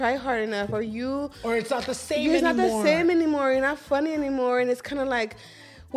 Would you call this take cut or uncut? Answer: uncut